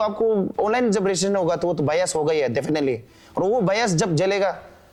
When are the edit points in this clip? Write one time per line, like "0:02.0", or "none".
none